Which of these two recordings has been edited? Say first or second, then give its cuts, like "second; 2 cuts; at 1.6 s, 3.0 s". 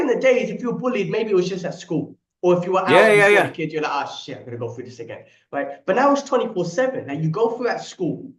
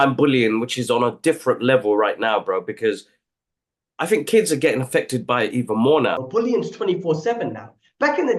second; 1 cut; at 6.2 s